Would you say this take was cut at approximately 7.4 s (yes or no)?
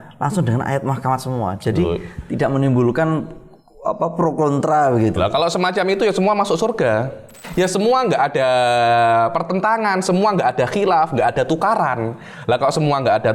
yes